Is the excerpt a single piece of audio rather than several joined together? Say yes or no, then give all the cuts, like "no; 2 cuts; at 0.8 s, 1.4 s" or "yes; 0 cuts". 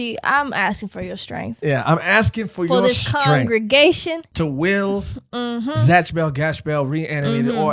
no; 1 cut; at 4.3 s